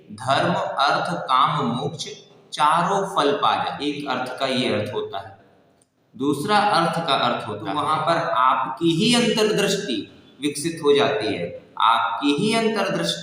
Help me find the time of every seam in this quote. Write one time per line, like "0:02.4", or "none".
0:03.8
0:07.6

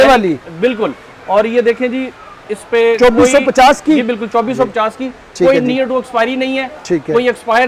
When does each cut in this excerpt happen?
none

